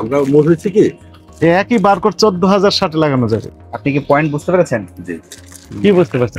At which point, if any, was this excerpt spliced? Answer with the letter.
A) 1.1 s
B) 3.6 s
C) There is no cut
B